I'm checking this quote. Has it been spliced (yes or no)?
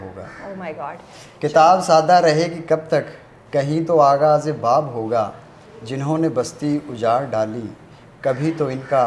no